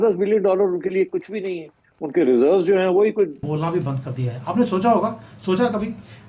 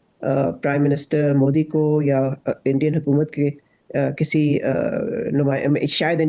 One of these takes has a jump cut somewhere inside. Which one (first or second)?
first